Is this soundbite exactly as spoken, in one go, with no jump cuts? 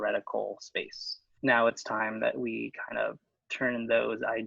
no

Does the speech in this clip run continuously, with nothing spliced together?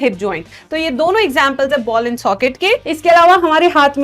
no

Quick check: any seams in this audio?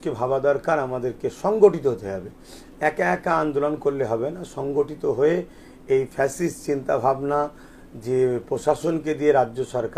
no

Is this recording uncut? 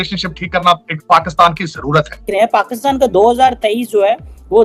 no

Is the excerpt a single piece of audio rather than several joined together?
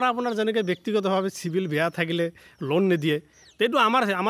yes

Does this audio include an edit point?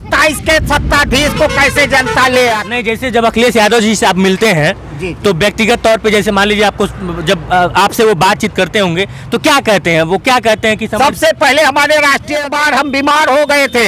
yes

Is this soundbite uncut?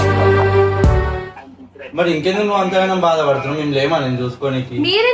yes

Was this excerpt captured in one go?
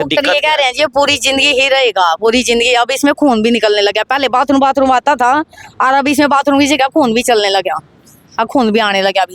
yes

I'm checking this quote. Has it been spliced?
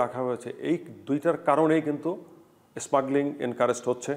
no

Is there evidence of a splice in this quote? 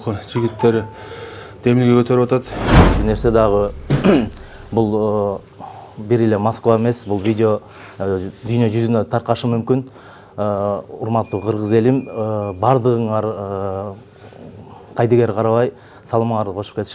yes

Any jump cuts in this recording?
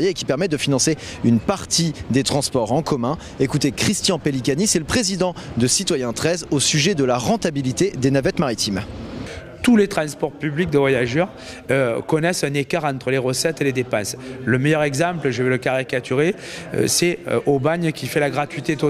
no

